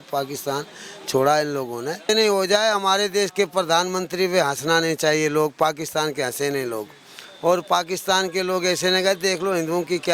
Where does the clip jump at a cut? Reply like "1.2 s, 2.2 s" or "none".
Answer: 2.1 s